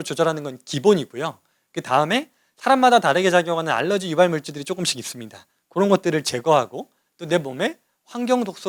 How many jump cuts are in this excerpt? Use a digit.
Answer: 0